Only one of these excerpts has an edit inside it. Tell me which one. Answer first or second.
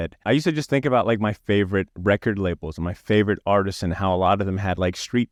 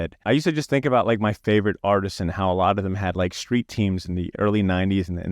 second